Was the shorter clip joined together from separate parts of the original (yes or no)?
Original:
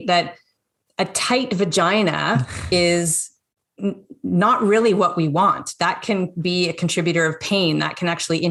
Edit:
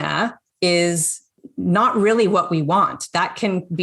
yes